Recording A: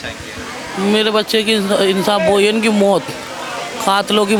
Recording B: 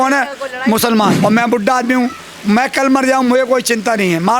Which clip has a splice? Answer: B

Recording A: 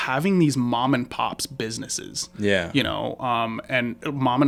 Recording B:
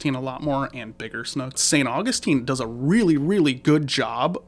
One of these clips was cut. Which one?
B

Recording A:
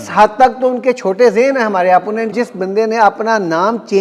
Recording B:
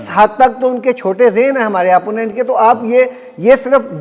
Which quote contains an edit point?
A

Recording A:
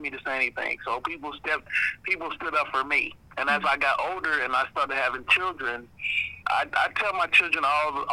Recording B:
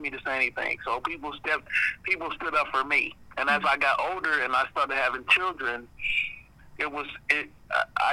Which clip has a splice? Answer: A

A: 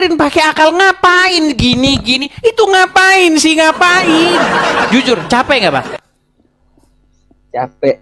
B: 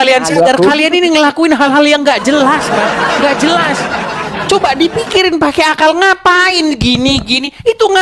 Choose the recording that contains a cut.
A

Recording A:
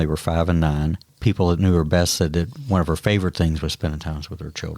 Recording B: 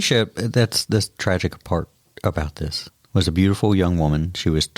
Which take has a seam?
A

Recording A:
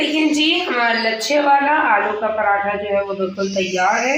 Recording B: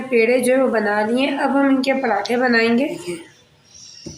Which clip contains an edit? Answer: B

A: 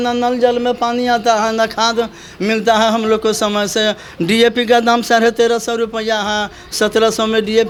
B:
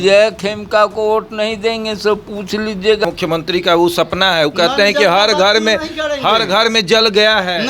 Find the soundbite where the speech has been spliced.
B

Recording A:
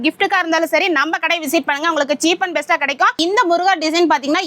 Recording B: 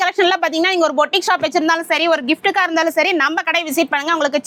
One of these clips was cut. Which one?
A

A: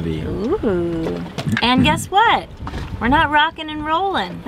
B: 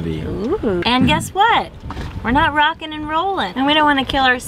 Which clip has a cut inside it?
B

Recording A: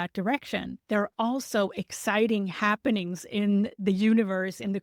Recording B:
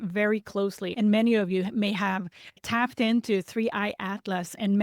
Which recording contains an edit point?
A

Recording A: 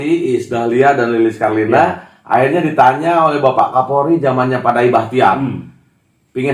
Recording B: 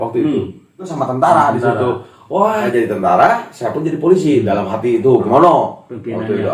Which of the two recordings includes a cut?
B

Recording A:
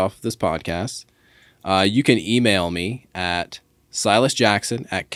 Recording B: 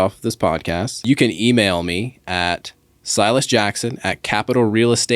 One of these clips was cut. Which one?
B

